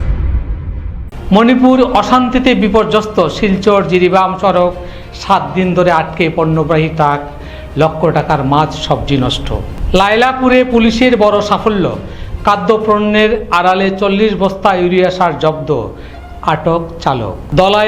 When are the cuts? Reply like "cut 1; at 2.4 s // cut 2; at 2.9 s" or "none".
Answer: cut 1; at 1.0 s